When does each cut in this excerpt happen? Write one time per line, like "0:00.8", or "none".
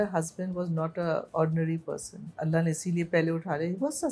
0:01.3
0:02.4